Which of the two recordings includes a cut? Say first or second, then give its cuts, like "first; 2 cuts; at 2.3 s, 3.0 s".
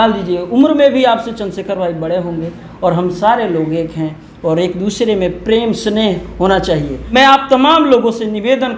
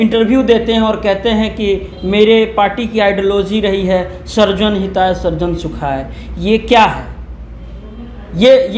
first; 1 cut; at 7.0 s